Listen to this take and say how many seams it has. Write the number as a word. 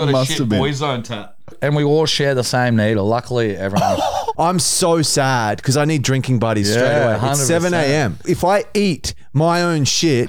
three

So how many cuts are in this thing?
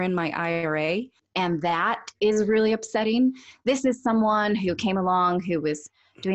one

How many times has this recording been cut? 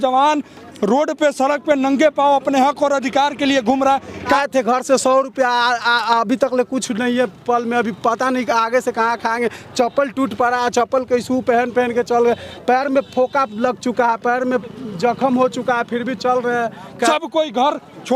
two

